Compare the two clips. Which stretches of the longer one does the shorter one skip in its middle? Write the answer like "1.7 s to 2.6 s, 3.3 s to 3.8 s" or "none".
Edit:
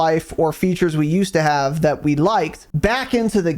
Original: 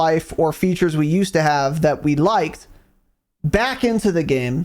2.6 s to 3.3 s